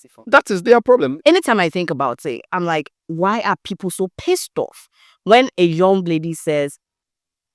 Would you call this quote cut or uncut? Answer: cut